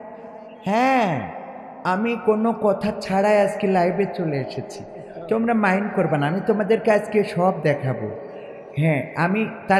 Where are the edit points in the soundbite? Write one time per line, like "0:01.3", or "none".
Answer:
none